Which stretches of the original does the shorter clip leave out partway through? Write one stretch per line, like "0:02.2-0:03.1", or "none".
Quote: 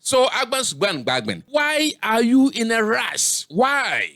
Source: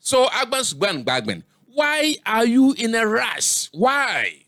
0:01.4-0:01.7